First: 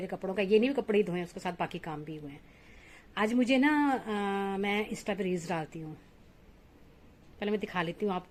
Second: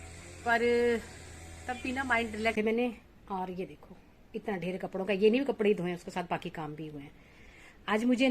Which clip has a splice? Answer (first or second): second